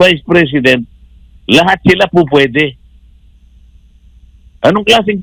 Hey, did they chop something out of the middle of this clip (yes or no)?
no